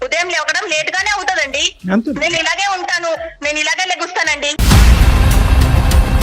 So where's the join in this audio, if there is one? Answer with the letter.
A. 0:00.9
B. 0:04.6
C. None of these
B